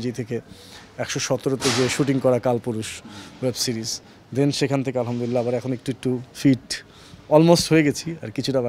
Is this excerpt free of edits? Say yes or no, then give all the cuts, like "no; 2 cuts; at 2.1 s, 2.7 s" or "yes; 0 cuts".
yes; 0 cuts